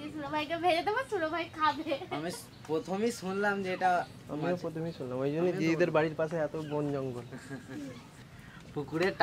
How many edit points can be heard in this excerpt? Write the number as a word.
one